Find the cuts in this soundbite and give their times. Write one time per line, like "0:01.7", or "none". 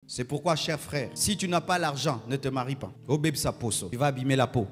0:01.1
0:02.9
0:03.8